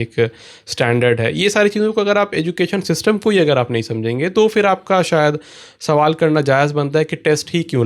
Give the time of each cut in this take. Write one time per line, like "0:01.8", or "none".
none